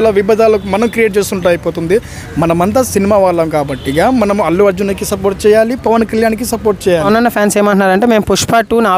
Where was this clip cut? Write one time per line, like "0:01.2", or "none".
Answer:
0:07.0

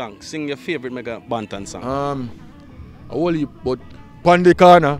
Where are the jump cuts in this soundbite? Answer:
none

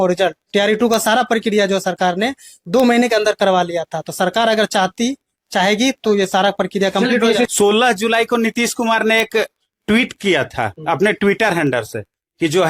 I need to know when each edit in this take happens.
0:07.5

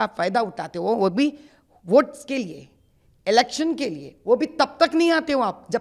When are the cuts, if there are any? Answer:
none

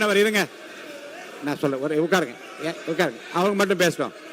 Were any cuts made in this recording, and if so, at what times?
none

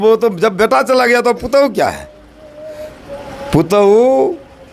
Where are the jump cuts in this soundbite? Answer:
none

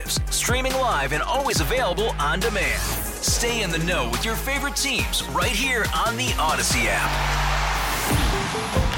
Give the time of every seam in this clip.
none

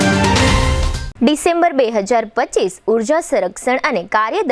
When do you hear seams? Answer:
0:01.0

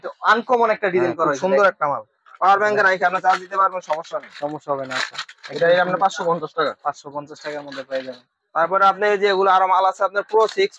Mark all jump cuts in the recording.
none

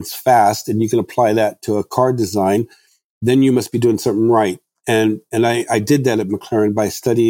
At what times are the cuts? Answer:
none

